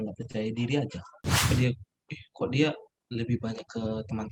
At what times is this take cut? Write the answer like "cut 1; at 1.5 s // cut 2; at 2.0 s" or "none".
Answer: cut 1; at 1.5 s